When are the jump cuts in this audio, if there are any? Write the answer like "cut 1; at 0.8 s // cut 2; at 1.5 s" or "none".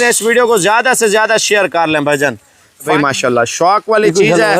cut 1; at 2.9 s